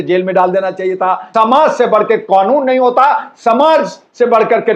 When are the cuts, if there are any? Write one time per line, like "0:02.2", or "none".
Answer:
0:01.2